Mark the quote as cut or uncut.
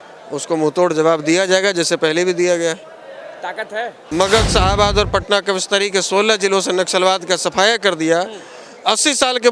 cut